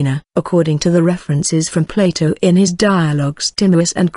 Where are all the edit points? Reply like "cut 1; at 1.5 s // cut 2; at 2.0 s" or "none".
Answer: cut 1; at 3.2 s